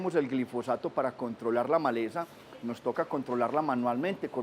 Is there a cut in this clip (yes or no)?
yes